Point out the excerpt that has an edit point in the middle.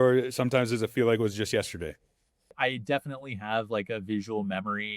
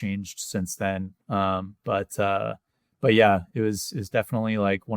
first; 1 cut; at 2.5 s

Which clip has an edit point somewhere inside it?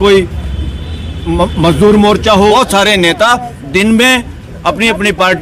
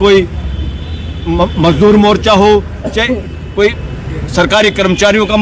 first; 1 cut; at 2.5 s

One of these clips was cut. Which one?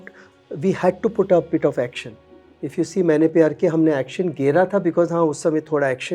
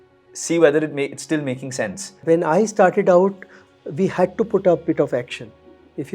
second; 1 cut; at 2.1 s

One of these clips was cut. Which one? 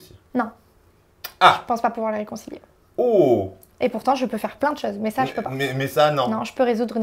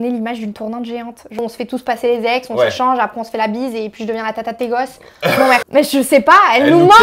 second; 2 cuts; at 1.4 s, 5.6 s

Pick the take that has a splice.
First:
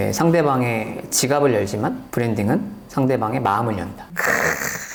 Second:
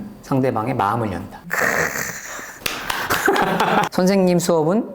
second; 1 cut; at 3.9 s

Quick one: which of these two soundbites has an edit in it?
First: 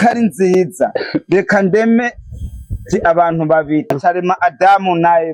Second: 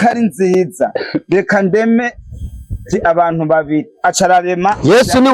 first; 1 cut; at 4.0 s

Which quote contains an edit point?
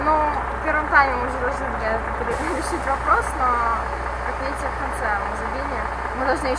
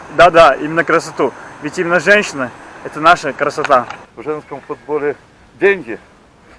second; 1 cut; at 4.0 s

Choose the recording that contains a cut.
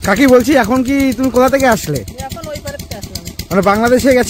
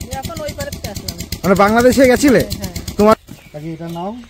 second; 1 cut; at 3.1 s

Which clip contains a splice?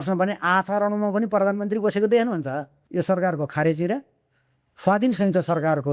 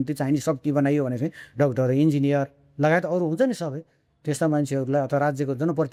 first; 1 cut; at 2.8 s

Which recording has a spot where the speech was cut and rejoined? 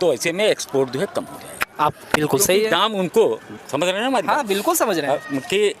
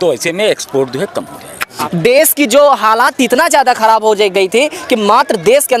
second; 1 cut; at 1.8 s

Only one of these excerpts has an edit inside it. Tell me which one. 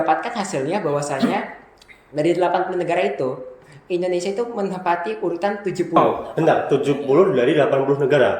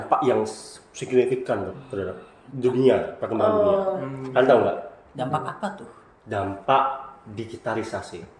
first; 1 cut; at 6.0 s

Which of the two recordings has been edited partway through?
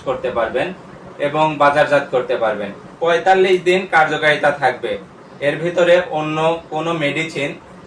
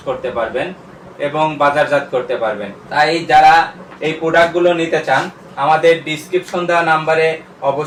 first; 1 cut; at 2.8 s

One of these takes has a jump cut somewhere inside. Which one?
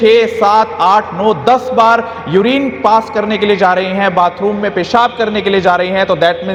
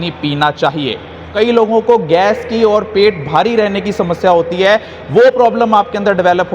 second; 1 cut; at 1.5 s

